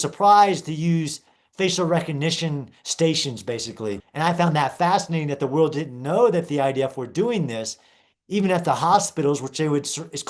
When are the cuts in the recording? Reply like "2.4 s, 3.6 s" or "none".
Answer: 4.0 s